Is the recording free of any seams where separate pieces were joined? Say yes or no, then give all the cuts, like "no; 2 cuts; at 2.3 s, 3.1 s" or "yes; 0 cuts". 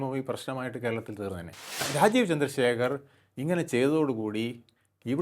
no; 1 cut; at 1.9 s